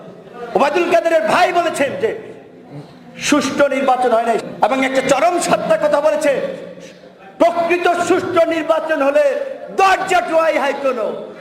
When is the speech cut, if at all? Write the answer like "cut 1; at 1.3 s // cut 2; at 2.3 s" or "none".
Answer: cut 1; at 4.4 s

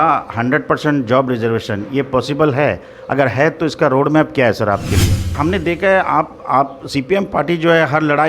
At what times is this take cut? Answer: cut 1; at 5.3 s

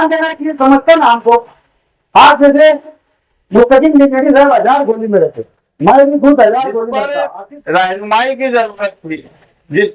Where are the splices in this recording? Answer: cut 1; at 7.1 s

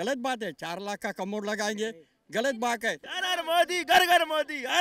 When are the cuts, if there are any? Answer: cut 1; at 3.0 s

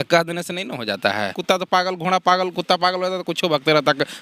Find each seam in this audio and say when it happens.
cut 1; at 1.4 s

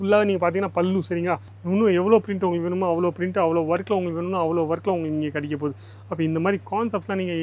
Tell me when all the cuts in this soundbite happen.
cut 1; at 1.6 s

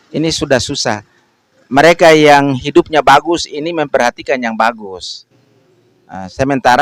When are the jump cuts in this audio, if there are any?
none

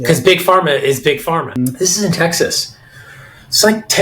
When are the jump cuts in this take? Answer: cut 1; at 1.5 s

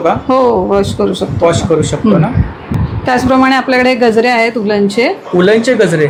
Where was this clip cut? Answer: none

